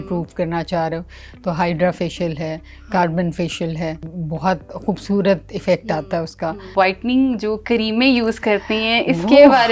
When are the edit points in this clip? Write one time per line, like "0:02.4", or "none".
0:04.1
0:06.7